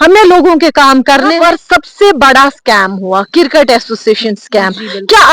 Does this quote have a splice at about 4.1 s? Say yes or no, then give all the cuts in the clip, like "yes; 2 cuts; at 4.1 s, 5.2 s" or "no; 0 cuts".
no; 1 cut; at 1.3 s